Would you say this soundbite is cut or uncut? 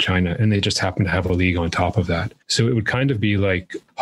cut